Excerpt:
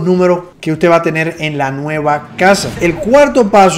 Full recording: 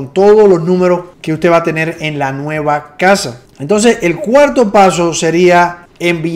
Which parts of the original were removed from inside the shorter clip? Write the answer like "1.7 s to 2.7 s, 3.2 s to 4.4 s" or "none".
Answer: 3.4 s to 4.0 s